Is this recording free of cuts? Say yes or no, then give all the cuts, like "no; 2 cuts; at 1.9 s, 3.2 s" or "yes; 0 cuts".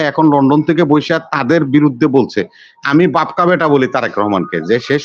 yes; 0 cuts